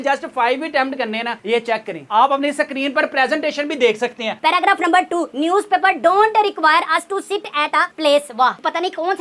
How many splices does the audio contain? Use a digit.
1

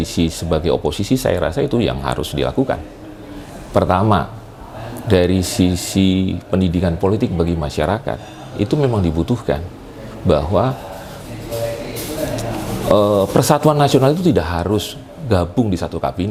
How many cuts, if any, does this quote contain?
0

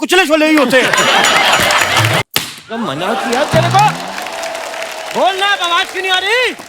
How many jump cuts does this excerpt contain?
1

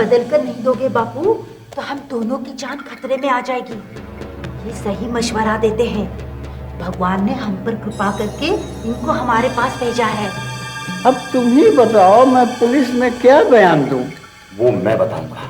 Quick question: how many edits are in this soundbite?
0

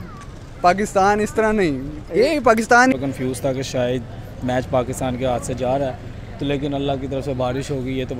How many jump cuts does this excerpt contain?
1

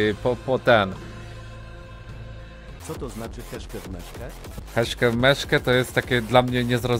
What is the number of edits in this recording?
2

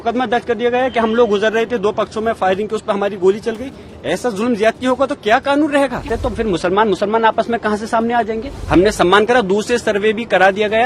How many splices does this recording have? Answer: 2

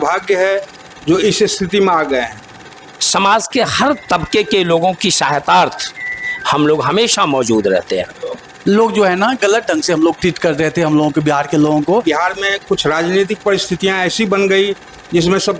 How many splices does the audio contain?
3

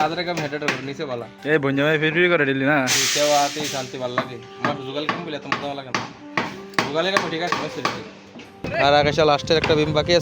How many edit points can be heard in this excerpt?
1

